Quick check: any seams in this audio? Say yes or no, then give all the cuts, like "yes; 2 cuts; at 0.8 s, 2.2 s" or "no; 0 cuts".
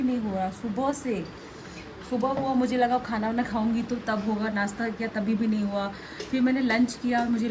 no; 0 cuts